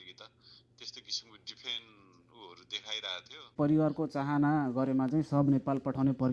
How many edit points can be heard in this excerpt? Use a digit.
1